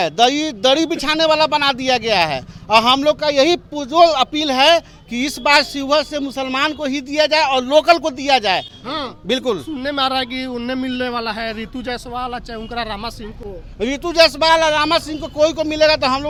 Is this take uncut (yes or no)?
yes